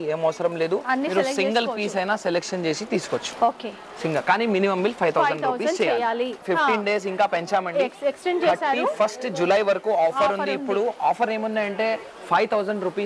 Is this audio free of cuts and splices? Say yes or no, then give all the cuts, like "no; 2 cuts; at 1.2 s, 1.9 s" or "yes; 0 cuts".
no; 1 cut; at 6.4 s